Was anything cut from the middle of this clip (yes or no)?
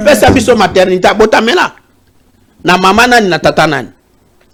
no